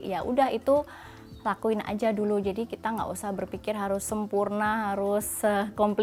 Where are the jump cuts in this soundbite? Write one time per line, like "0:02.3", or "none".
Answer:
none

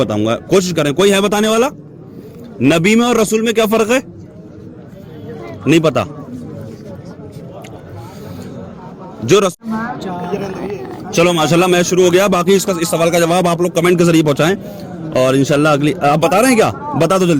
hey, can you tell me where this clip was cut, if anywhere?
0:09.5

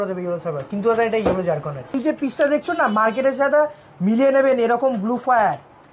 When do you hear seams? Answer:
0:02.0

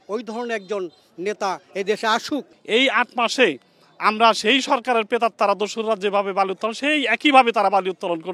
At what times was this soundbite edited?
0:02.5

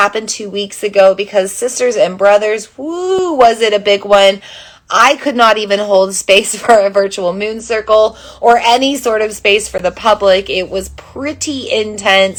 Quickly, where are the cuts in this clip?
none

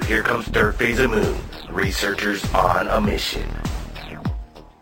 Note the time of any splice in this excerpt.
none

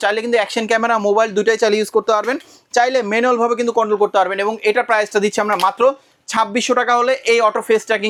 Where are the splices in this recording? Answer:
none

